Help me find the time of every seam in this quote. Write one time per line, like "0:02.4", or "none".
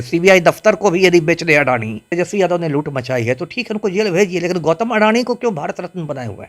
0:02.1